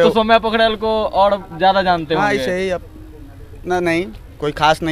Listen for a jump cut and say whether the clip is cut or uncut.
uncut